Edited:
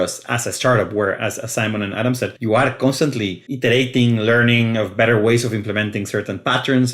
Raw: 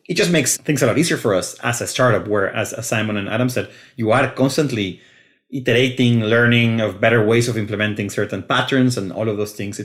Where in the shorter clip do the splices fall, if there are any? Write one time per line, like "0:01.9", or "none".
0:02.4
0:03.4

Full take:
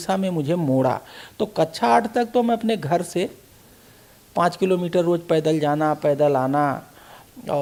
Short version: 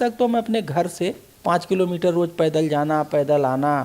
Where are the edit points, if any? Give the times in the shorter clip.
0:01.3

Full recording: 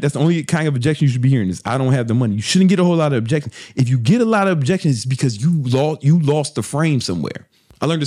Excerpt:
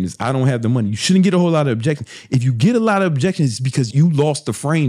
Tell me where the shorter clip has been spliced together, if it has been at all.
0:03.9

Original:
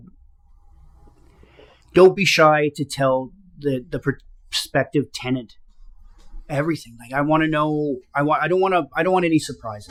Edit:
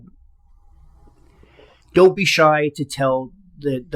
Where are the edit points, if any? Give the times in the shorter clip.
none

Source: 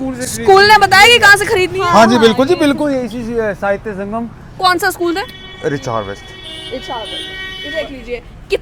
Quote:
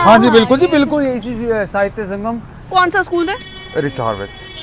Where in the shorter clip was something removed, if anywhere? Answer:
none

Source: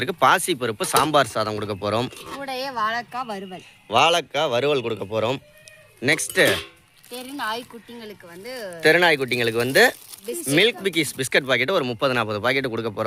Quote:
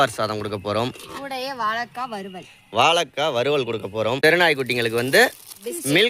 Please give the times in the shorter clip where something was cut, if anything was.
0:04.2

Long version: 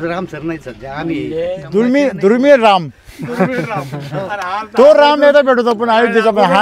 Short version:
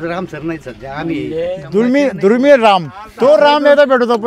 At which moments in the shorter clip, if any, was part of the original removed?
0:03.0

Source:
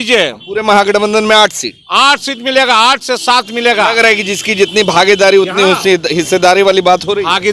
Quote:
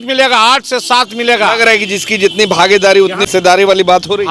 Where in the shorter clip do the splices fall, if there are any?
0:03.2

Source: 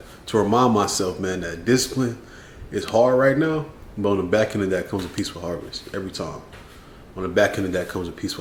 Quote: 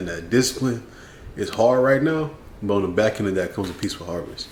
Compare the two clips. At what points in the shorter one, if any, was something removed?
none

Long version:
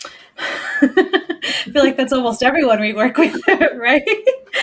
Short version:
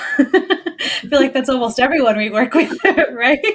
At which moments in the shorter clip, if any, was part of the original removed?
none

